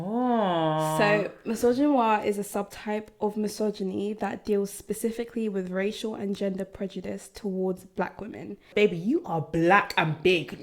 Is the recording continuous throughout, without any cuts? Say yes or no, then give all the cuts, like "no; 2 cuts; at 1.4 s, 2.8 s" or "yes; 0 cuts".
no; 1 cut; at 8.7 s